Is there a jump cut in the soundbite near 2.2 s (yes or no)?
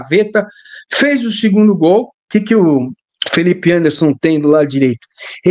yes